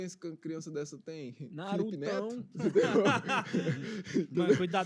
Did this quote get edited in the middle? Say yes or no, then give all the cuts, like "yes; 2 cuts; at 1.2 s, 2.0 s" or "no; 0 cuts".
yes; 1 cut; at 2.5 s